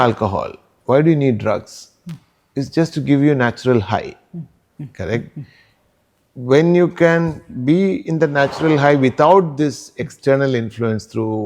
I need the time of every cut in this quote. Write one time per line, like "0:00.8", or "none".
none